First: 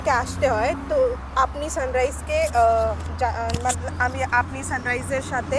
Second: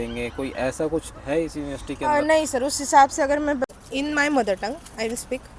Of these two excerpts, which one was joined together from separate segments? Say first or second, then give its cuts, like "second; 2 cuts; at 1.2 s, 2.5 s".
second; 1 cut; at 3.7 s